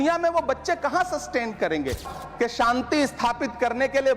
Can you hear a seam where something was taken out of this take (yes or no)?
yes